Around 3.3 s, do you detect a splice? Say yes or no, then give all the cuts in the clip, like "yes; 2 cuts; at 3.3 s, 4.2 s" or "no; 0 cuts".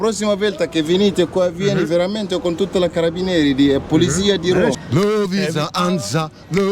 no; 1 cut; at 4.8 s